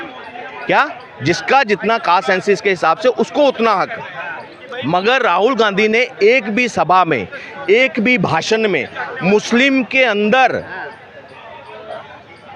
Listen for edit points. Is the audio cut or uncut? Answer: uncut